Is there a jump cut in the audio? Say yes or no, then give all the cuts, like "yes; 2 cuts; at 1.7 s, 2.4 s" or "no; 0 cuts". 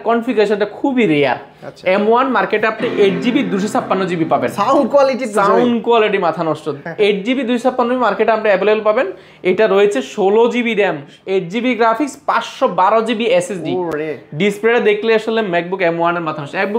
no; 0 cuts